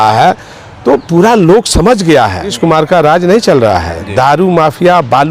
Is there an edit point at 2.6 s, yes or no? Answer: yes